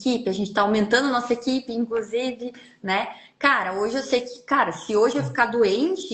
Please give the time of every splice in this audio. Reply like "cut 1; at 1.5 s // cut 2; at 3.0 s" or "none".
none